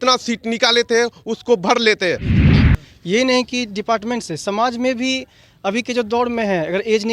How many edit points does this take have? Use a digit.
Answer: 1